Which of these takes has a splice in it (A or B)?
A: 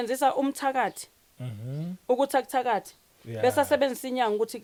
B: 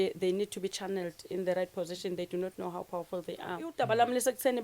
B